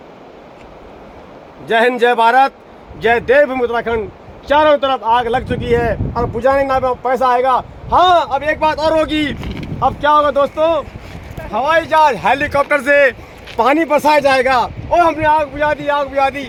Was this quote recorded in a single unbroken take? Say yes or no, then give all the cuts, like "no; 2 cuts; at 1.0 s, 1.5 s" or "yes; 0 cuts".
yes; 0 cuts